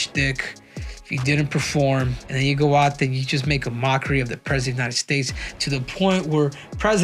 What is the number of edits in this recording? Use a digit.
1